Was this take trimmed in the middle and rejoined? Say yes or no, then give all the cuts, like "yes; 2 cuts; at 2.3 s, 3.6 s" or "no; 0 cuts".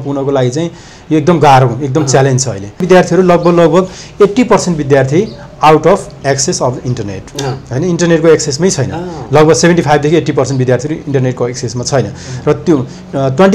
yes; 1 cut; at 2.8 s